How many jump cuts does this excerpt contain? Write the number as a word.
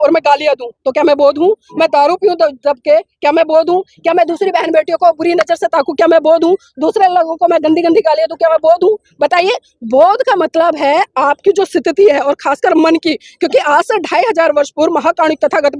zero